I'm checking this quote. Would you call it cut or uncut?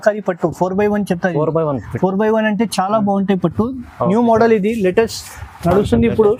uncut